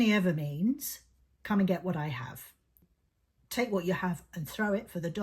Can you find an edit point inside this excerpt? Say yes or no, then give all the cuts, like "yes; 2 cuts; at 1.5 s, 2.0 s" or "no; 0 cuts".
yes; 1 cut; at 3.0 s